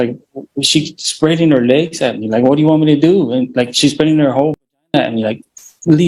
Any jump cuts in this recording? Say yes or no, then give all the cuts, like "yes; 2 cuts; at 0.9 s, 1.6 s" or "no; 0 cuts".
no; 0 cuts